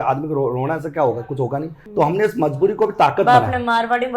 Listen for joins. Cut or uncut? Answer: uncut